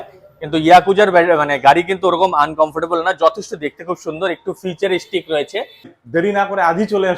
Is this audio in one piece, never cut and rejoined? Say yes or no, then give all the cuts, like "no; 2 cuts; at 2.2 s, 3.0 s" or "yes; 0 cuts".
no; 1 cut; at 5.9 s